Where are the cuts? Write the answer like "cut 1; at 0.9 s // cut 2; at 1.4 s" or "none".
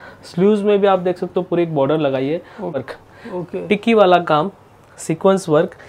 cut 1; at 2.7 s